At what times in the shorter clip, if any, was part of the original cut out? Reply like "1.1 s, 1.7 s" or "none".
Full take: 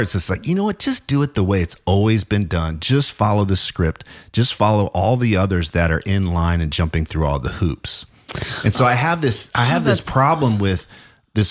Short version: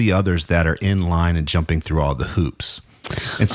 none